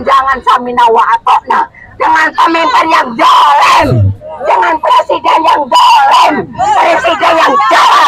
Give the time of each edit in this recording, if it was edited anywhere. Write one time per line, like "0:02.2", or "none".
none